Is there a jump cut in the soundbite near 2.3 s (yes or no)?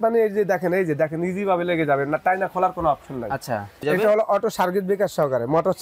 no